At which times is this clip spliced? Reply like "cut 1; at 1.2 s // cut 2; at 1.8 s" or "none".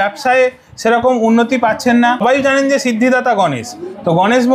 cut 1; at 2.2 s